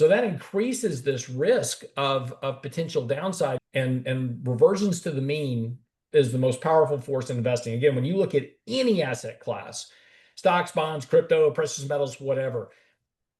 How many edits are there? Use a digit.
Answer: 1